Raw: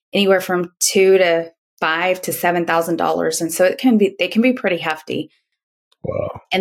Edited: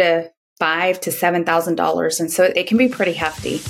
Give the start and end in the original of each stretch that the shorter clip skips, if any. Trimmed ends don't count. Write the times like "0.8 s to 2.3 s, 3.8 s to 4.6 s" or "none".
3.8 s to 4.2 s